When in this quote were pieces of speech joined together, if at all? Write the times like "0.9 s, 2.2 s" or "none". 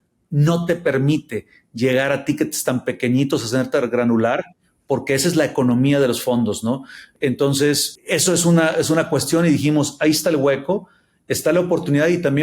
7.1 s

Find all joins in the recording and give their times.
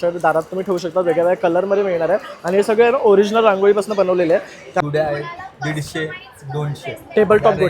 4.8 s

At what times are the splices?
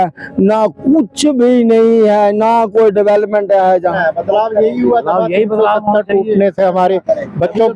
4.0 s

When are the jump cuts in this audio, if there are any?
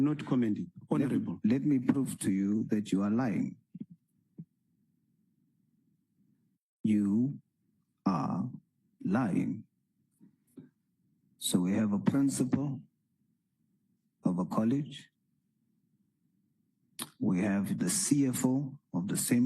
10.4 s

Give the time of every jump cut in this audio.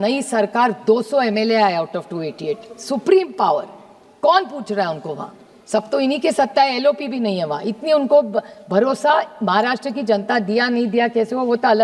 none

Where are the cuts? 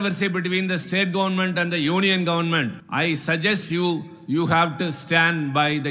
2.8 s

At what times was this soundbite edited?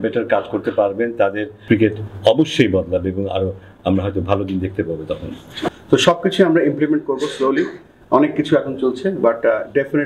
1.5 s, 5.7 s

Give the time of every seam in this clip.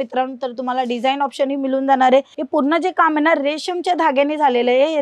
2.4 s

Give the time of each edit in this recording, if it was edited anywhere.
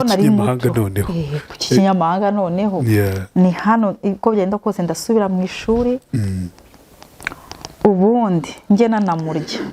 none

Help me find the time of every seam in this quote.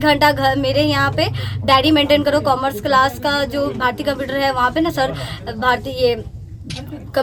none

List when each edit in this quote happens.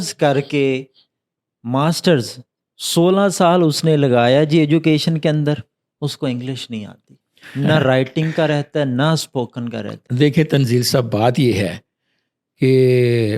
none

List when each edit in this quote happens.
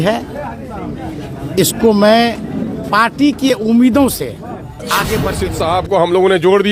5.4 s

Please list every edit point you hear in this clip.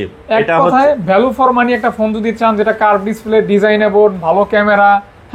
none

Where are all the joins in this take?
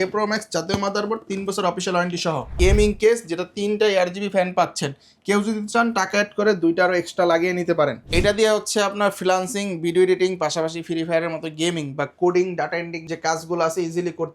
2.5 s, 8.0 s

